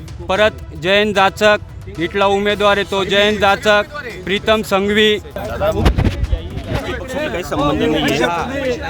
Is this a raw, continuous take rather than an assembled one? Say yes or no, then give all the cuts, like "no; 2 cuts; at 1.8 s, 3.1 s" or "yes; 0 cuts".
no; 1 cut; at 5.4 s